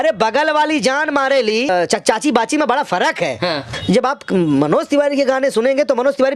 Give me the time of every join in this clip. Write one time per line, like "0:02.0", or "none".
0:01.7
0:03.7